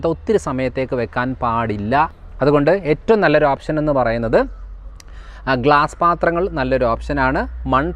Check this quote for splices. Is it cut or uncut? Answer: cut